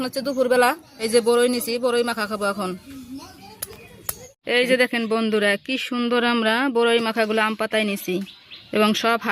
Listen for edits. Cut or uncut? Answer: cut